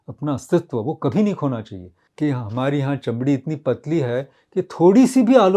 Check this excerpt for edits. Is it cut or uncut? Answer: cut